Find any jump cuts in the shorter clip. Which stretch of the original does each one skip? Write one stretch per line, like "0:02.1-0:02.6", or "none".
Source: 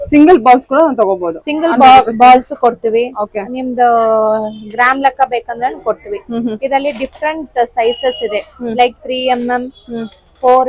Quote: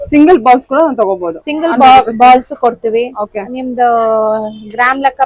none